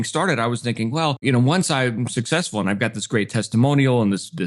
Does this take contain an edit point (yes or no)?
yes